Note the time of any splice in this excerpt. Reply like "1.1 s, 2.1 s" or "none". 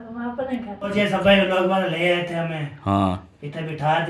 0.9 s

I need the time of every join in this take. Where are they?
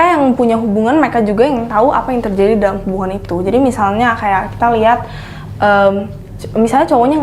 none

